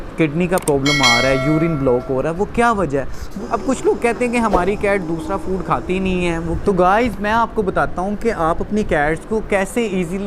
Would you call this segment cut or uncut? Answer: cut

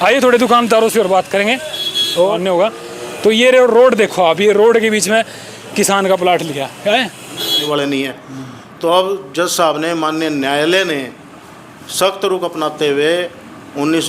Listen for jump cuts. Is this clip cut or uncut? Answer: cut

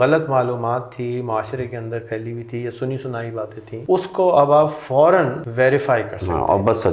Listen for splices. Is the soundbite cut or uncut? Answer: cut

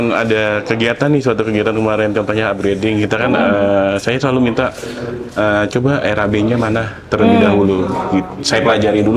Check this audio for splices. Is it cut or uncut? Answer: uncut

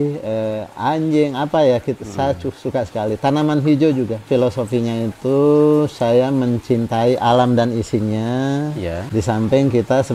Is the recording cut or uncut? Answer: cut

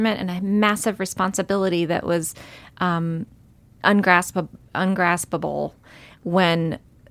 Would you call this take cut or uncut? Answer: uncut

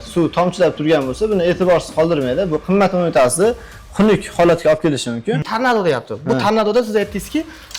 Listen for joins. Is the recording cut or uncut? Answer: cut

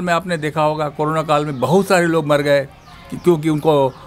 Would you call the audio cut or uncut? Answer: uncut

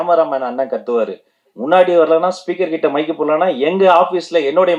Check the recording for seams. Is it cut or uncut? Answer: uncut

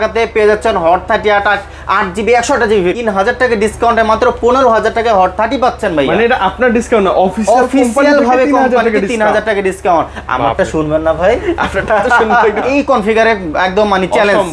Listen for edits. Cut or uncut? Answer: cut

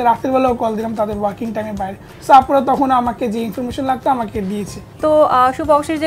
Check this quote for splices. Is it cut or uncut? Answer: cut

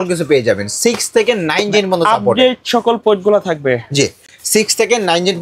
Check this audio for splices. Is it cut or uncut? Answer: uncut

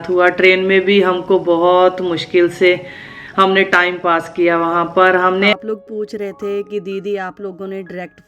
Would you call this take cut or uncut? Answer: cut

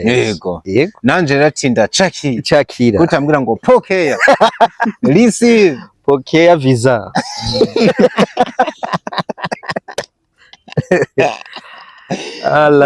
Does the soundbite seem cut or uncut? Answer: uncut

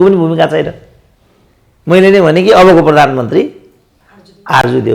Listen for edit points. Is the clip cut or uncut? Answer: uncut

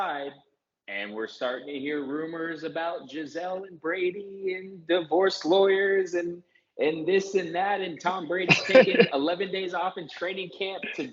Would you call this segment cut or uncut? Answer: uncut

